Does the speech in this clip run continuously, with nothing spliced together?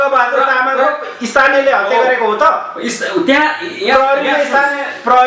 yes; 0 cuts

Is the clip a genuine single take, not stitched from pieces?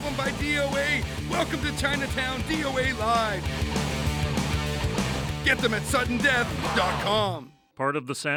yes; 0 cuts

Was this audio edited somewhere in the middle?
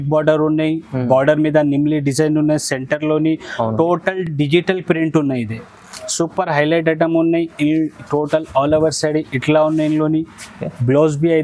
no; 0 cuts

